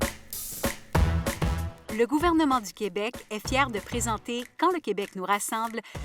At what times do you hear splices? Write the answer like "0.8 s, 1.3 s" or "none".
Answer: 1.7 s

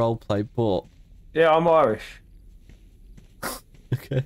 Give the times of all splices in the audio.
none

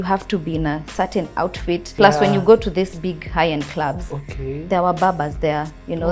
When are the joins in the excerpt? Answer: 1.9 s

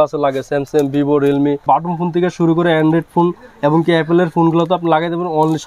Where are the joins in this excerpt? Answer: 1.6 s

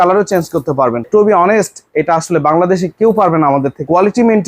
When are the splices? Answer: 1.0 s

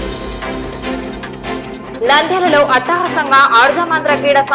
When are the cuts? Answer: 1.9 s

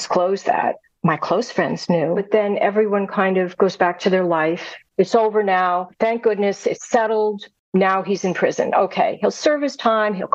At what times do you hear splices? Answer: 2.2 s, 4.8 s, 5.9 s, 7.5 s

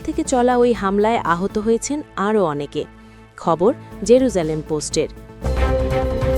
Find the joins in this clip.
5.4 s

